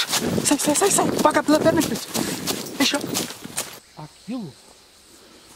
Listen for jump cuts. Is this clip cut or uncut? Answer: cut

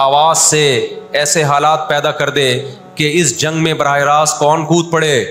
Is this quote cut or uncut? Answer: uncut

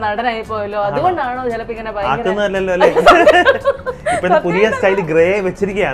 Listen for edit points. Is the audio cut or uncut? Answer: uncut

